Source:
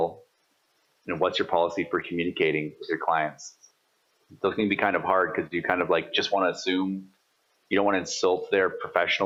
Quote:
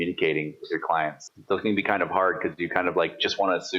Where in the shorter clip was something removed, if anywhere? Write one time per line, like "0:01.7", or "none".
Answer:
0:01.3